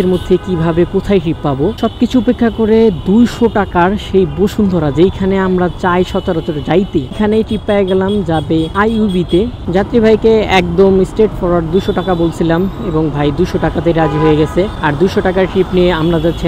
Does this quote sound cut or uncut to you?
uncut